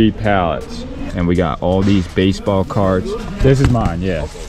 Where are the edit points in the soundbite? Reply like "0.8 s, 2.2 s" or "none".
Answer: 1.0 s, 3.2 s